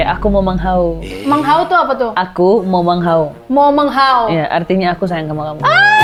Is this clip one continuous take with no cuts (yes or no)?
yes